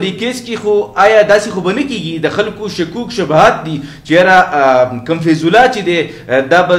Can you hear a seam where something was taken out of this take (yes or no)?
no